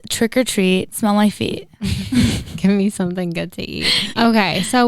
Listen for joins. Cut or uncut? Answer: cut